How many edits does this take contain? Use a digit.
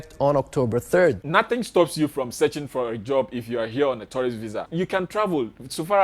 2